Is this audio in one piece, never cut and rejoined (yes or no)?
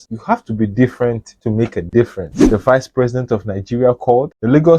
no